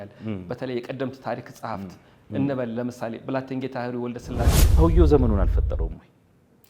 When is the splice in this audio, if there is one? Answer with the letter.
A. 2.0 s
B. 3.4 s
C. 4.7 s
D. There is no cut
C